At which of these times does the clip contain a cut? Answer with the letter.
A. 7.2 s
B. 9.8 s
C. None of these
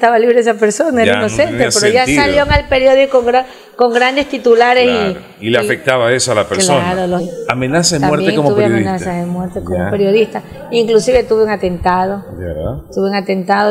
A